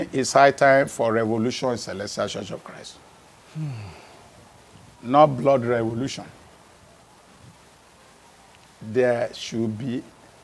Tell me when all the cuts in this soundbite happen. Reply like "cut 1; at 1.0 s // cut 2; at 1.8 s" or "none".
none